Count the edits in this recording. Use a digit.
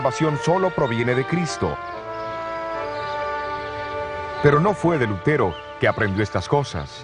1